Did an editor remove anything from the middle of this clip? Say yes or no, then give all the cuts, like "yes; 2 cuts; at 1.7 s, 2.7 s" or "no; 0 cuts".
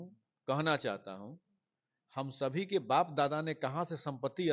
no; 0 cuts